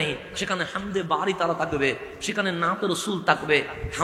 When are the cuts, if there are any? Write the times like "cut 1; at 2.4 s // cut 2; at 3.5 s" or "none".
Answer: none